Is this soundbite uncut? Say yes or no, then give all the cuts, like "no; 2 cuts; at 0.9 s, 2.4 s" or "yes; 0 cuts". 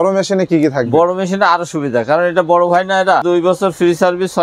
no; 1 cut; at 3.2 s